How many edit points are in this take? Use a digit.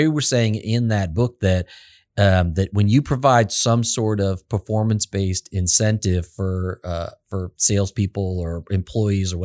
0